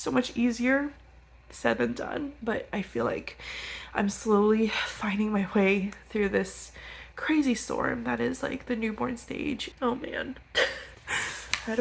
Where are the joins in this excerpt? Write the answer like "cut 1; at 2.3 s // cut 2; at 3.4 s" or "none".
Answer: cut 1; at 2.4 s // cut 2; at 9.7 s